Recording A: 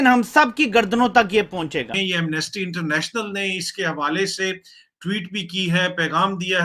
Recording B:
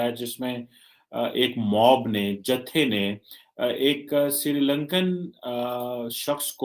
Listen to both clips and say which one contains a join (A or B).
A